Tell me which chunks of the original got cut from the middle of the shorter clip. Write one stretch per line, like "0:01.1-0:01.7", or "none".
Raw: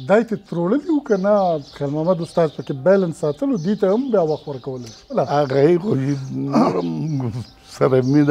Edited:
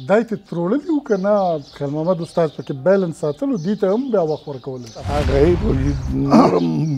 0:05.0-0:05.2